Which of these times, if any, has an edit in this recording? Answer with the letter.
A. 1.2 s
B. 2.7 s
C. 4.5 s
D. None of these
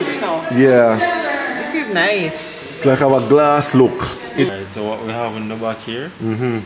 C